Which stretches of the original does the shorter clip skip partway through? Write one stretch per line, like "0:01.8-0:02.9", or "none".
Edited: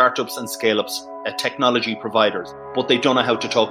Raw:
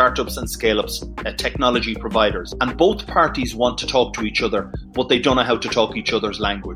0:02.5-0:04.7